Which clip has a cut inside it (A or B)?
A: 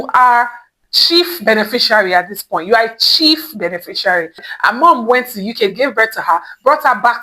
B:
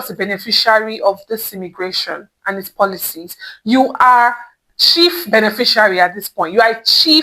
A